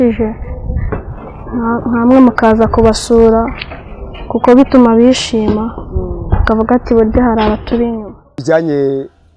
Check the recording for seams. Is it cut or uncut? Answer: cut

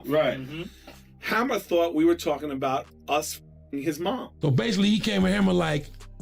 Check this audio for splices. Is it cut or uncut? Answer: cut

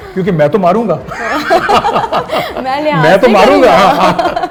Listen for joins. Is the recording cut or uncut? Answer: uncut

